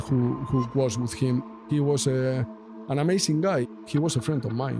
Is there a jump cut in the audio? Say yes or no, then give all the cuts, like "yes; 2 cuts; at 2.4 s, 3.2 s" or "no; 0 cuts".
yes; 2 cuts; at 1.4 s, 3.7 s